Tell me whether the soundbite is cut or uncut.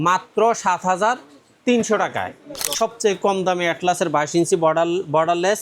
cut